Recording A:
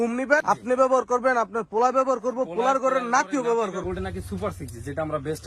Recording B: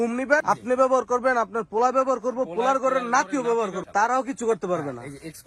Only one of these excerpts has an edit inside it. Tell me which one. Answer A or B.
A